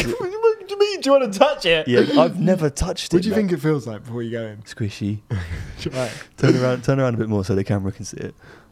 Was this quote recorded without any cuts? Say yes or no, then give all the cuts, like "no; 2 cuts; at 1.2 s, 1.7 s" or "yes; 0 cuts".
no; 1 cut; at 3.0 s